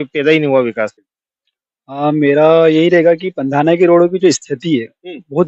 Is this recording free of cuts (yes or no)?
no